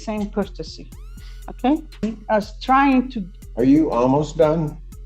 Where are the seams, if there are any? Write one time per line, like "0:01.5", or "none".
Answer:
0:02.0